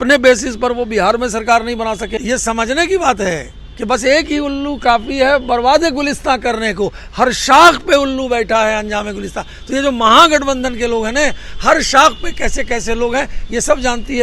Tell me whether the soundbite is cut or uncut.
cut